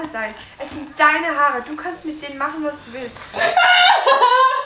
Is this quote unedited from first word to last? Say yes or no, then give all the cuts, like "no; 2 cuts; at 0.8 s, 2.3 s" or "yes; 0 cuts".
no; 1 cut; at 3.4 s